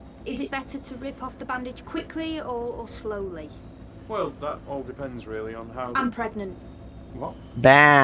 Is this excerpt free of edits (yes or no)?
yes